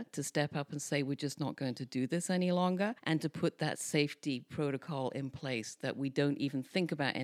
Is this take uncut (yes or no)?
yes